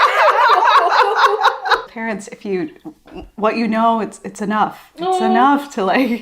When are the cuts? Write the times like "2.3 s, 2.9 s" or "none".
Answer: 1.9 s

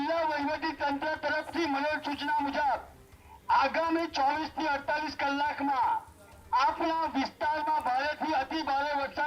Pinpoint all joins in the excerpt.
none

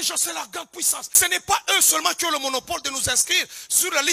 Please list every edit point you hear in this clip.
1.0 s

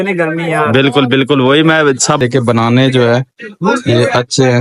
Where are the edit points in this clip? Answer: 2.2 s

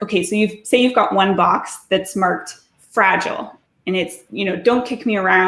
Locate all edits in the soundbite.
none

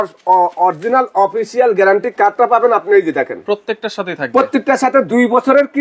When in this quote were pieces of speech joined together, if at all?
none

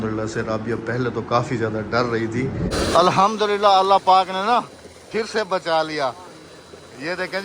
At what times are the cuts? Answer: 2.7 s

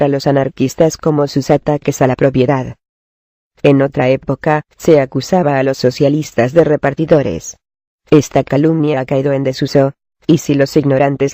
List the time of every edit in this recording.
6.6 s

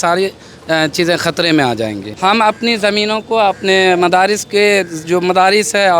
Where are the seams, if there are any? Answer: 2.1 s

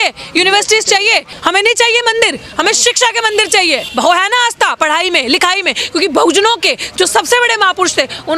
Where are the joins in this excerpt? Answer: 1.3 s, 3.9 s

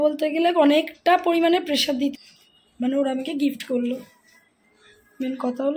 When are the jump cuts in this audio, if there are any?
2.2 s

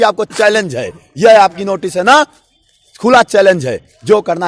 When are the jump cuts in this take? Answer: none

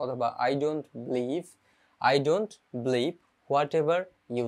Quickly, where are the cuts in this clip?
none

